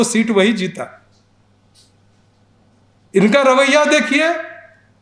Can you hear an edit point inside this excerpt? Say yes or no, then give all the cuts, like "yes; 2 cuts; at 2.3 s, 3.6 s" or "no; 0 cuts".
no; 0 cuts